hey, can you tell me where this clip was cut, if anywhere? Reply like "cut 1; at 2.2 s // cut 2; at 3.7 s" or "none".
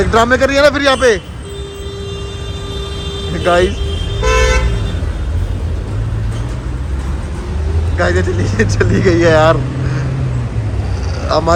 none